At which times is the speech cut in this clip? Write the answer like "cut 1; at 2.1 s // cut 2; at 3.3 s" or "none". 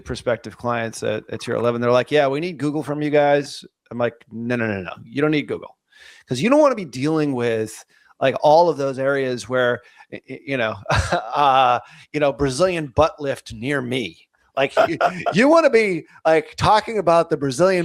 none